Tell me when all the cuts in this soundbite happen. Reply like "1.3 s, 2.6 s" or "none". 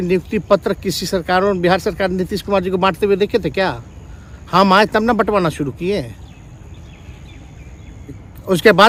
none